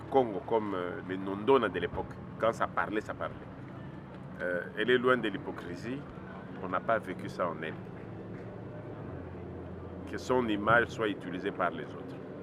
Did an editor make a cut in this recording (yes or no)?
no